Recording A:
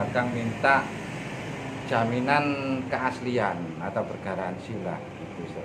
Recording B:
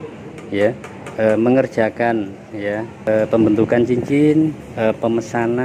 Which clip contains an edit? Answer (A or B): B